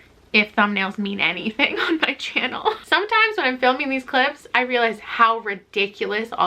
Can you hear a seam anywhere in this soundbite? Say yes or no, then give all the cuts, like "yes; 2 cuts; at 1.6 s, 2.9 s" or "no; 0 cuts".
yes; 1 cut; at 2.8 s